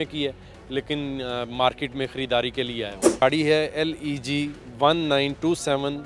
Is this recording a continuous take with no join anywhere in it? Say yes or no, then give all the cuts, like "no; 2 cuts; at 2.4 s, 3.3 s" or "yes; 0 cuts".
no; 1 cut; at 3.2 s